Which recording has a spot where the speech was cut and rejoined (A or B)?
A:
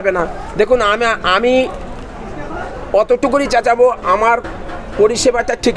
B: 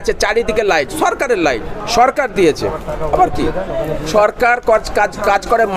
B